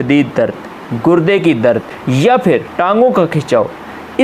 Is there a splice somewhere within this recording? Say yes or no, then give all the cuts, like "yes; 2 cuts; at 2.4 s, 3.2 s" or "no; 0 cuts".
yes; 1 cut; at 2.3 s